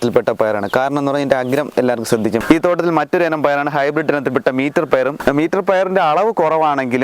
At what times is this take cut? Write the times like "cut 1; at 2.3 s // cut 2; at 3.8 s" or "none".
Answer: cut 1; at 2.4 s // cut 2; at 5.2 s

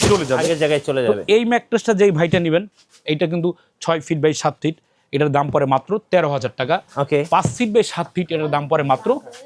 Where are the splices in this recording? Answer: none

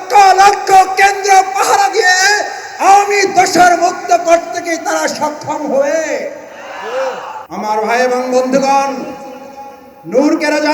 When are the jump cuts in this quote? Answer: cut 1; at 7.4 s

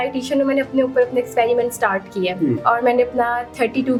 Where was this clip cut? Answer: none

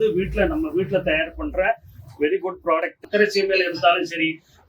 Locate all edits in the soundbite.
cut 1; at 3.0 s

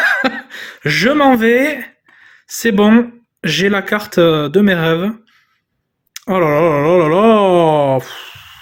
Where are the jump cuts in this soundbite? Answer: none

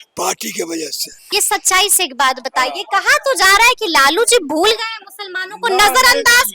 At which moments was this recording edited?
cut 1; at 1.3 s

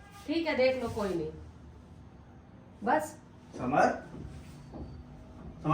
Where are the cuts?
none

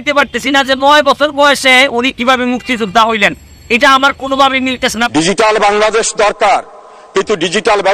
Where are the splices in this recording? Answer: cut 1; at 5.0 s

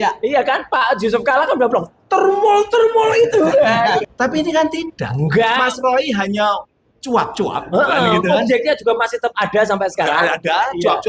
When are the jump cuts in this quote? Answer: cut 1; at 4.1 s

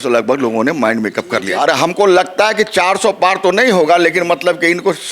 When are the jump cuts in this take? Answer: cut 1; at 1.5 s

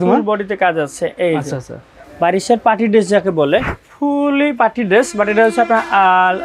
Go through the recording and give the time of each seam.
cut 1; at 3.7 s

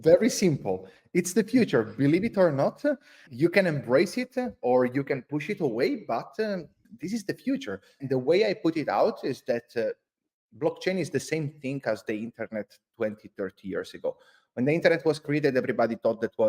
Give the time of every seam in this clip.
cut 1; at 3.2 s // cut 2; at 8.0 s

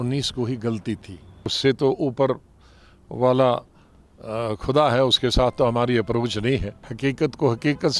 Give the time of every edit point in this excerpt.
cut 1; at 1.5 s // cut 2; at 6.8 s

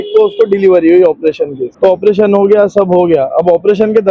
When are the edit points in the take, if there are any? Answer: cut 1; at 1.6 s

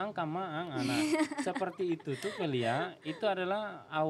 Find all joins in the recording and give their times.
none

